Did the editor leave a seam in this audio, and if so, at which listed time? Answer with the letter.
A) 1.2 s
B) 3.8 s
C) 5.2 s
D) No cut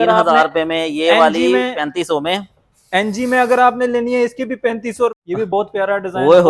C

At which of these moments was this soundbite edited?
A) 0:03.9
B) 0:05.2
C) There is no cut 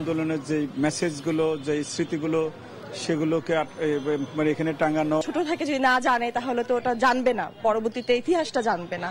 B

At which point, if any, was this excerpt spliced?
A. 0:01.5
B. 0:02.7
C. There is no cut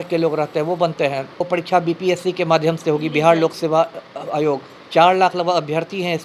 A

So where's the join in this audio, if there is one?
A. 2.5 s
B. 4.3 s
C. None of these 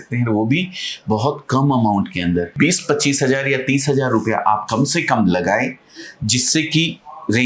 A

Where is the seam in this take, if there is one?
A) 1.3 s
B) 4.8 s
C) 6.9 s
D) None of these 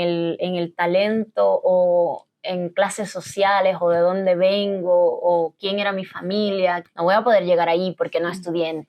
C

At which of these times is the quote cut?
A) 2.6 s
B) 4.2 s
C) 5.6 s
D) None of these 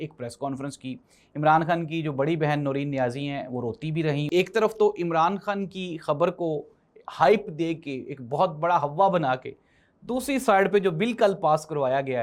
B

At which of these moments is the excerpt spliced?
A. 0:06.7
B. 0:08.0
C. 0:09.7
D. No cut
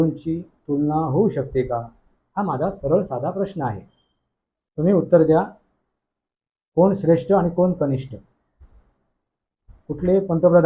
D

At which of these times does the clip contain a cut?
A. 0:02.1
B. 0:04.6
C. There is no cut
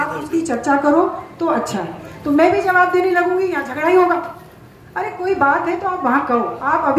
A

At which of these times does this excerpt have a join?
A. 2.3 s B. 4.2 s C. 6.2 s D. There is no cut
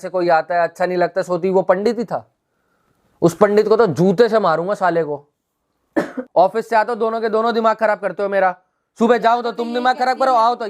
C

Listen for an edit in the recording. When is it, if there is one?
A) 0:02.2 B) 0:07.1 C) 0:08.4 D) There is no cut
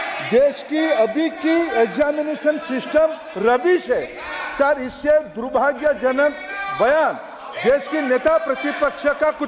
D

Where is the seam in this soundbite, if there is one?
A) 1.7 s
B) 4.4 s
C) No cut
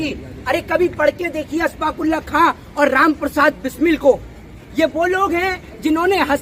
C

